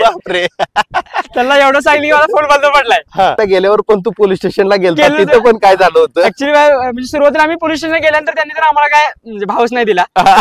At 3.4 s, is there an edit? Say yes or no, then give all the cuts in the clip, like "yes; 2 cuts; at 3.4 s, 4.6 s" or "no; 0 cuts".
yes; 1 cut; at 3.4 s